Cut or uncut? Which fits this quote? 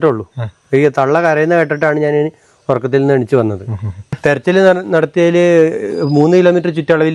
cut